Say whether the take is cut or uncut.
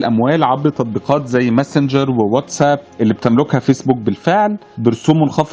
uncut